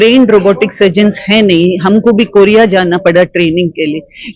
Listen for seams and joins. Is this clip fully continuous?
yes; 0 cuts

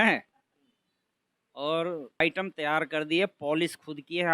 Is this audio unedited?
no; 1 cut; at 2.2 s

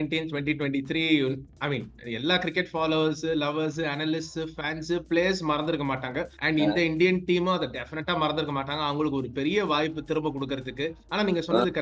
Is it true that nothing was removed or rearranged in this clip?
yes; 0 cuts

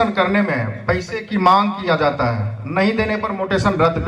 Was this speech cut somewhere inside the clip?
no; 0 cuts

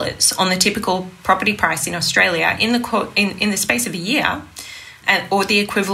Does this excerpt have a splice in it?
no; 0 cuts

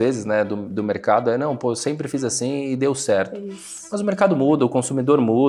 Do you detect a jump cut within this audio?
no; 0 cuts

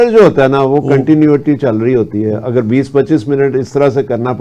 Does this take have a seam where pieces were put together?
no; 0 cuts

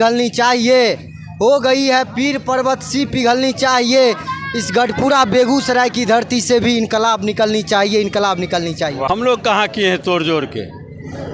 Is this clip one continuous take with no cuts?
no; 1 cut; at 9.1 s

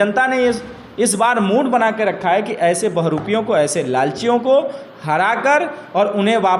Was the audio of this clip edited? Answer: no; 0 cuts

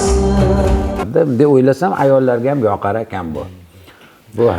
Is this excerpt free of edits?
no; 1 cut; at 1.0 s

